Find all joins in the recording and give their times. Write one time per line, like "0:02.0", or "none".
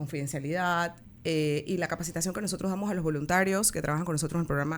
0:01.1